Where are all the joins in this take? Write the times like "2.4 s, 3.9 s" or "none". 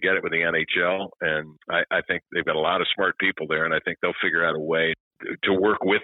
none